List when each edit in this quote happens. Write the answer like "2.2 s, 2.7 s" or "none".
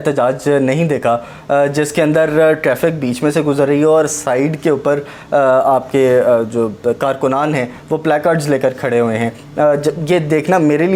none